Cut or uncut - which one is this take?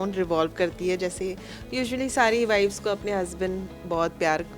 uncut